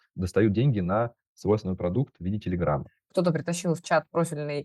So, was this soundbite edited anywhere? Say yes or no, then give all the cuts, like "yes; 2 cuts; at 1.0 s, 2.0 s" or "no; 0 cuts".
yes; 1 cut; at 2.9 s